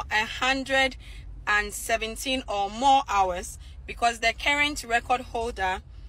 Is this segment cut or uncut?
uncut